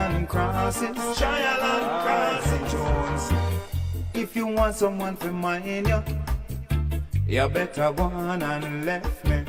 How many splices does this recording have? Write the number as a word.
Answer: zero